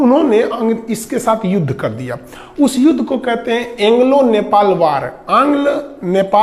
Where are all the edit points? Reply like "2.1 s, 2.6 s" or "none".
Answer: none